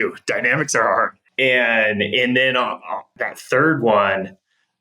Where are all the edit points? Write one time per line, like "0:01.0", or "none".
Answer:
0:01.2
0:03.2